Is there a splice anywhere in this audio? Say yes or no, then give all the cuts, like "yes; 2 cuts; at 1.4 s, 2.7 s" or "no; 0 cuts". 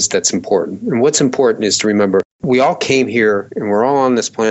no; 0 cuts